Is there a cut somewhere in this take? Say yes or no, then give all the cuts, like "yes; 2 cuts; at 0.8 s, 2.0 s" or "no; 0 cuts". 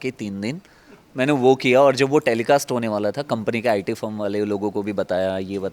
no; 0 cuts